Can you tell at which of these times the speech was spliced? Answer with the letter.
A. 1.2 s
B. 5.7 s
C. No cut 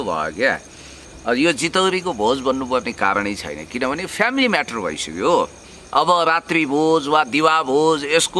C